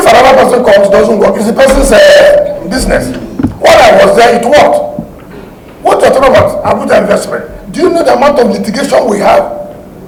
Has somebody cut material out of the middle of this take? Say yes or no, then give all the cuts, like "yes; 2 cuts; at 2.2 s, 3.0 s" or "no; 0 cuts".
no; 0 cuts